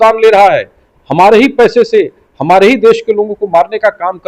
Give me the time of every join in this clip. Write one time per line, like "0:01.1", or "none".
none